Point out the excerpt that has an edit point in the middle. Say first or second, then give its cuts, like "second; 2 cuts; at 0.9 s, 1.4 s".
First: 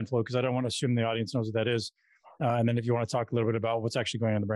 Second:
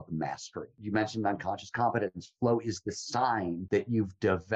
second; 2 cuts; at 0.8 s, 3.6 s